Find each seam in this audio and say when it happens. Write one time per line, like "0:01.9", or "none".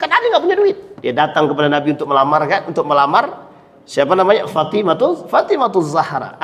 0:00.9